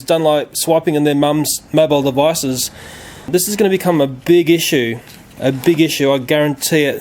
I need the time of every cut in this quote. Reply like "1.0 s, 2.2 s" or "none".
3.3 s